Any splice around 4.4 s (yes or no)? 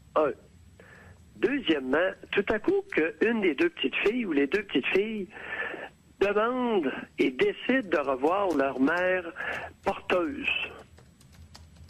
yes